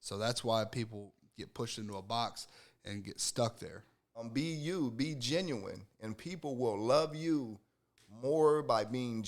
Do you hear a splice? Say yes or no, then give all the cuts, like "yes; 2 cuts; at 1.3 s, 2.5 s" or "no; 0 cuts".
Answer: yes; 1 cut; at 4.3 s